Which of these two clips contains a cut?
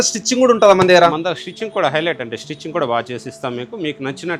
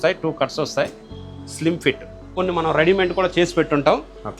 second; 1 cut; at 2.3 s

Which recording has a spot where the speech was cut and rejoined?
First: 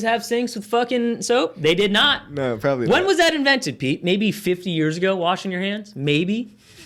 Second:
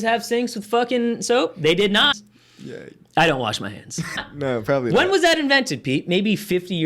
second; 2 cuts; at 2.2 s, 4.1 s

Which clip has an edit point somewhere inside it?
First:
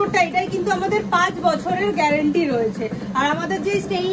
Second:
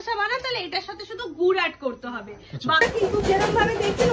second; 1 cut; at 2.8 s

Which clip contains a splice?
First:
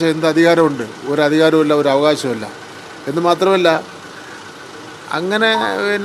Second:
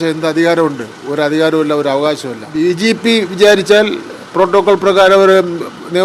second; 1 cut; at 2.4 s

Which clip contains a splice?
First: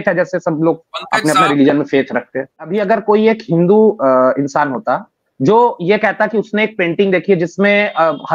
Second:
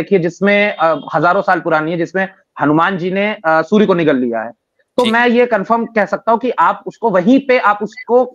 first; 1 cut; at 2.6 s

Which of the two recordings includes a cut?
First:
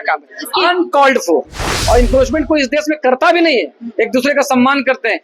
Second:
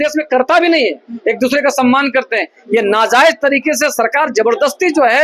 first; 1 cut; at 1.7 s

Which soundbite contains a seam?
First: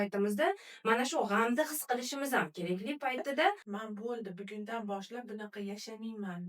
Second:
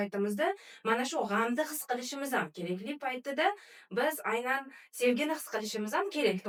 first; 1 cut; at 3.7 s

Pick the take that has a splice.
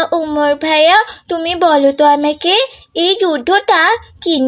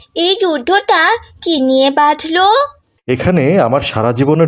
second; 1 cut; at 3.0 s

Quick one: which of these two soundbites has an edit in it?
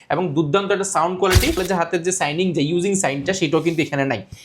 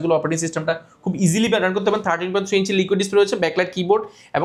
first; 1 cut; at 1.6 s

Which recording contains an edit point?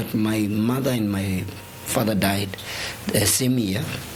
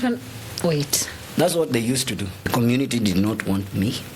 second; 1 cut; at 2.5 s

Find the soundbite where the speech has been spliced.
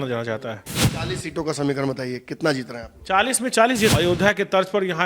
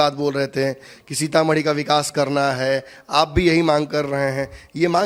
first; 2 cuts; at 0.9 s, 3.9 s

